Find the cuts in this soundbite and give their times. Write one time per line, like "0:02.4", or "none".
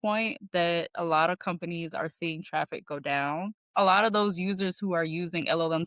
0:03.6